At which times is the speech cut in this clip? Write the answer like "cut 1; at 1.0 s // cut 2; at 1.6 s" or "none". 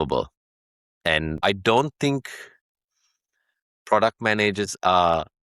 cut 1; at 1.4 s